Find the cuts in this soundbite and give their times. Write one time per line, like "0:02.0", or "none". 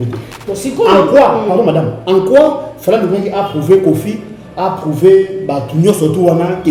none